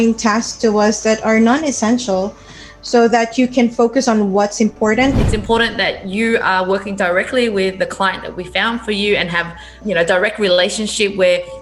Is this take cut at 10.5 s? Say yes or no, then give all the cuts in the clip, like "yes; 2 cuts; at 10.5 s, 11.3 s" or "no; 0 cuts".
no; 1 cut; at 5.2 s